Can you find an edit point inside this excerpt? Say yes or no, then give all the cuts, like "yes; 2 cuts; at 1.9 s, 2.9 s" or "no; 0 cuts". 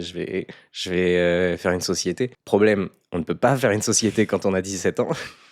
no; 0 cuts